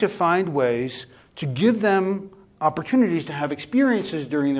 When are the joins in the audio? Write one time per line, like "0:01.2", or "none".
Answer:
none